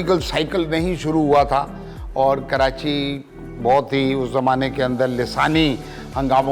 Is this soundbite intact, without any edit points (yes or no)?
yes